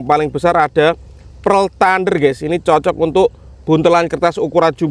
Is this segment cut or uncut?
uncut